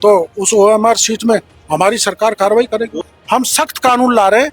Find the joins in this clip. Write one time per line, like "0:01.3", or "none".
0:03.0